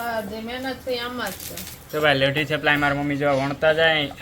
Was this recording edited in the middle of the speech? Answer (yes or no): no